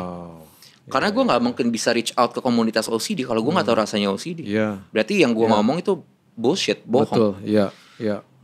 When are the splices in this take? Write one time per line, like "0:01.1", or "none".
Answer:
none